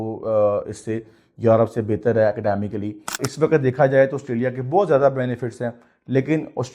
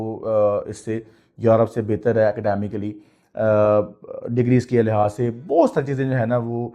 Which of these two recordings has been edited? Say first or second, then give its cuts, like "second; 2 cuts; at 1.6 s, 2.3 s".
first; 1 cut; at 3.2 s